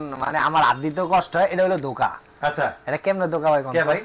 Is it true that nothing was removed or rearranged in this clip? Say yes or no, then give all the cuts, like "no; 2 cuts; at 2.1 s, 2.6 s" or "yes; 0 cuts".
yes; 0 cuts